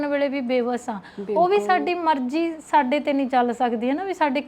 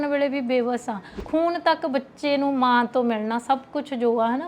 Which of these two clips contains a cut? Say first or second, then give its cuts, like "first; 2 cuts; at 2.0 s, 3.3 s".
second; 1 cut; at 1.1 s